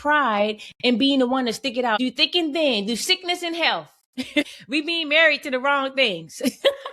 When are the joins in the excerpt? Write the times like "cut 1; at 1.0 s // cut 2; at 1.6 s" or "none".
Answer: cut 1; at 2.0 s // cut 2; at 4.5 s

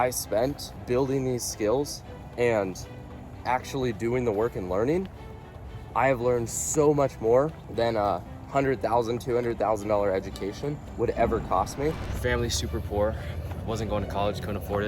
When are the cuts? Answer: cut 1; at 7.6 s // cut 2; at 12.1 s

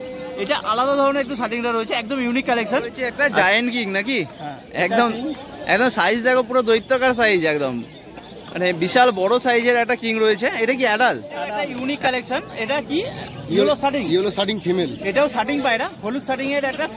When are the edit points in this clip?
cut 1; at 3.1 s // cut 2; at 11.7 s

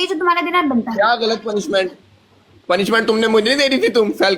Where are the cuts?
none

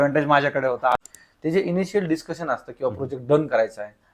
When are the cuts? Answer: cut 1; at 1.0 s

